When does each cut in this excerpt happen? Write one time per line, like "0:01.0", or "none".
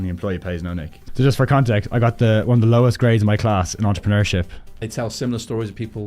0:00.9
0:04.8